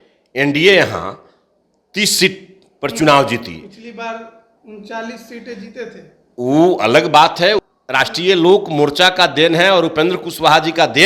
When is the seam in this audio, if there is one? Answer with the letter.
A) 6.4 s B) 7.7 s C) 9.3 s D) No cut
B